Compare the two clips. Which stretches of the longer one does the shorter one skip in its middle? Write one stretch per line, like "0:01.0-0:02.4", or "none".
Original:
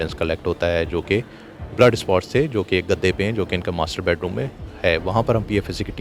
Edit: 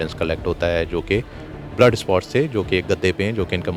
none